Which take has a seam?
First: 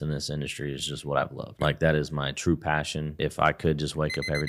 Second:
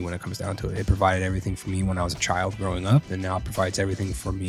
first; 2 cuts; at 1.4 s, 3.1 s

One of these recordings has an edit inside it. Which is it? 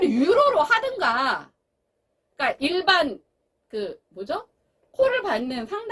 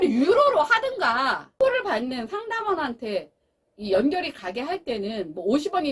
second; 1 cut; at 1.4 s

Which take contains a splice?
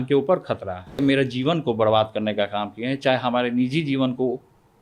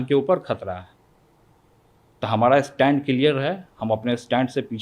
first; 1 cut; at 1.0 s

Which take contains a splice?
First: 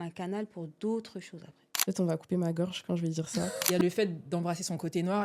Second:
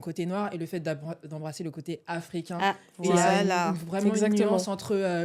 first; 2 cuts; at 1.7 s, 3.6 s

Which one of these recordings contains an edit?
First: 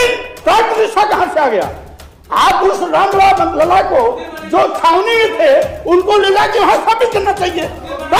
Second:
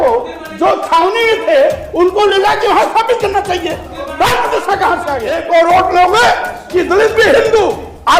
second; 1 cut; at 5.4 s

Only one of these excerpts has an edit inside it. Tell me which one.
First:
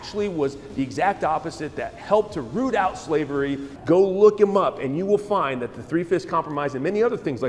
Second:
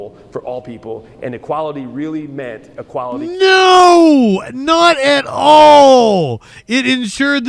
first; 1 cut; at 3.7 s

